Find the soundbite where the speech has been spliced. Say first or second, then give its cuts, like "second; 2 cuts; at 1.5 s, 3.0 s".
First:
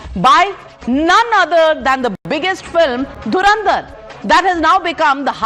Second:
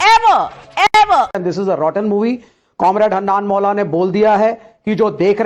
second; 1 cut; at 1.3 s